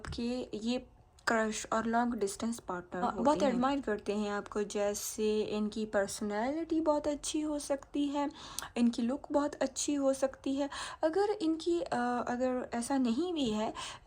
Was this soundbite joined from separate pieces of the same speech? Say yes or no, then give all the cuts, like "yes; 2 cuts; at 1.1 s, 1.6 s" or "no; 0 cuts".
yes; 1 cut; at 3.0 s